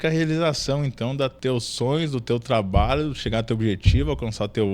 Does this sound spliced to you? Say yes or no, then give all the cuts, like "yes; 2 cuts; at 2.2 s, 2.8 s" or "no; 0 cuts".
yes; 1 cut; at 1.4 s